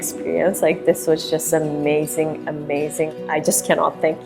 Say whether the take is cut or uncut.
cut